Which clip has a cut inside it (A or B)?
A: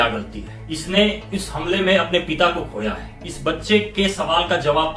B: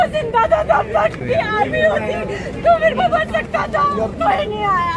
B